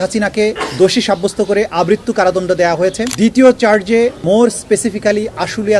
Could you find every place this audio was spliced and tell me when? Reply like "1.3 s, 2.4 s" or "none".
4.2 s